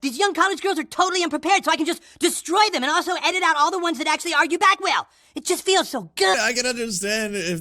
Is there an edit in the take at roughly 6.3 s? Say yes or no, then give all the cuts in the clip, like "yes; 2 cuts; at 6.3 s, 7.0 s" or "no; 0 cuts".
yes; 1 cut; at 6.3 s